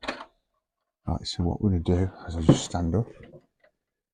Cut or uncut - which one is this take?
uncut